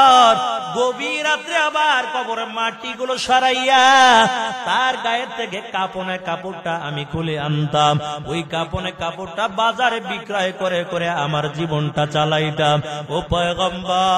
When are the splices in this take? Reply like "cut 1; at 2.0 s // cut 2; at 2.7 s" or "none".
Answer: none